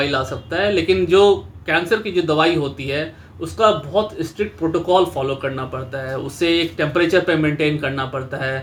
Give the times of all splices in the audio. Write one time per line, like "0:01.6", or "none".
none

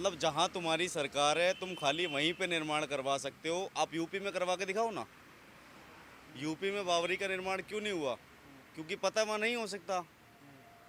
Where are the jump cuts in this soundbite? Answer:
none

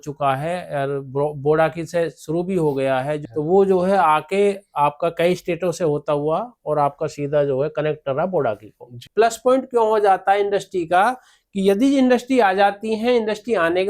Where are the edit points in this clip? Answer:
0:03.2
0:09.0

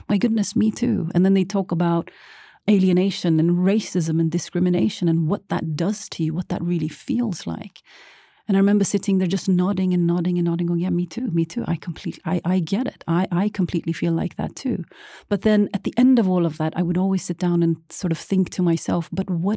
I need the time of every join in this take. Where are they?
0:02.7

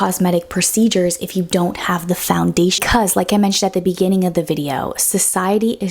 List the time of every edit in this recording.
0:02.8

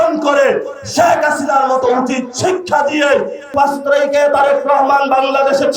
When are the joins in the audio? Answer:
0:03.5

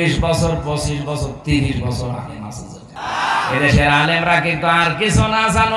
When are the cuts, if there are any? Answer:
0:02.9

